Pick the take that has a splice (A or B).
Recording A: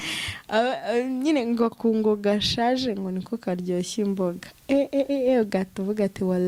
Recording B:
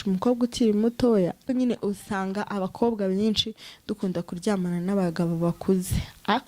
B